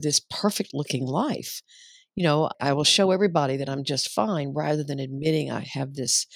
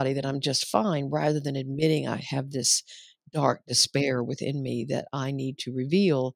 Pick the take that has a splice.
first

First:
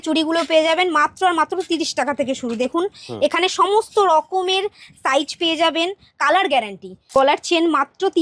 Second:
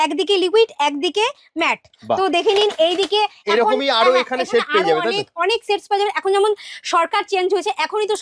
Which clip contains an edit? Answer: first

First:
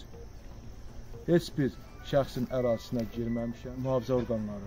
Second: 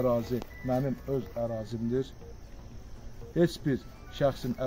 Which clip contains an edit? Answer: first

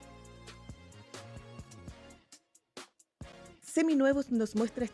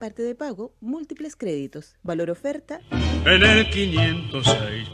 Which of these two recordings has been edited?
first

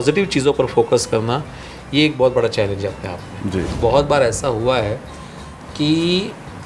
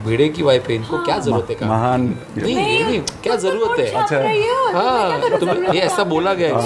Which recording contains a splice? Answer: first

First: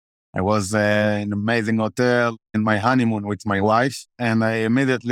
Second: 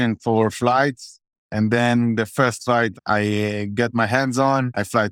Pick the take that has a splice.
first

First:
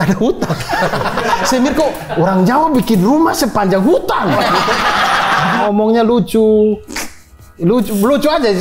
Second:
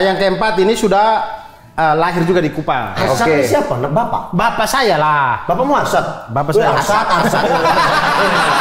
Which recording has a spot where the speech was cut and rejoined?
first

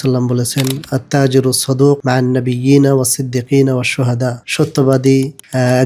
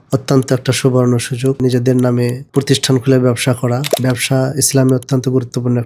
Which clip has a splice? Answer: second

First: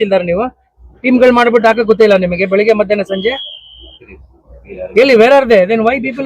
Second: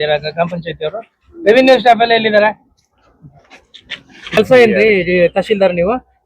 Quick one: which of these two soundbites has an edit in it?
second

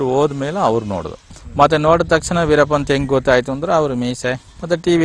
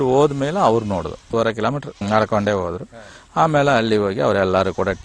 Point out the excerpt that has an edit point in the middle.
first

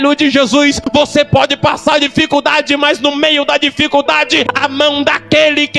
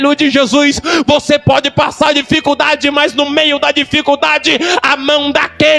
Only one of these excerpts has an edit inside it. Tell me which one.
first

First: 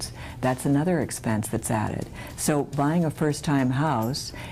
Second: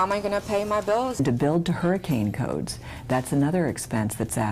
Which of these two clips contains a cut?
second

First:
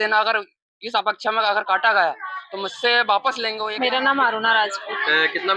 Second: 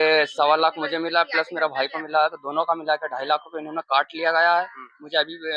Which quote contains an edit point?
first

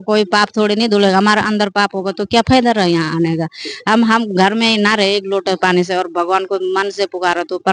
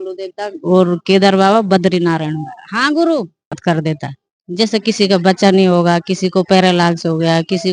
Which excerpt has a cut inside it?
second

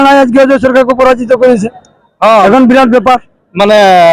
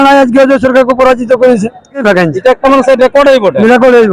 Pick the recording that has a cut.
second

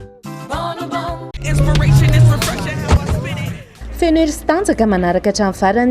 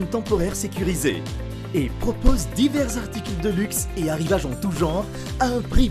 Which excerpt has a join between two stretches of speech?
first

